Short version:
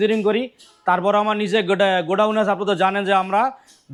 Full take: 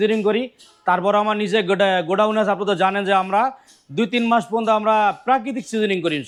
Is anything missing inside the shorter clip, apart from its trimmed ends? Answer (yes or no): no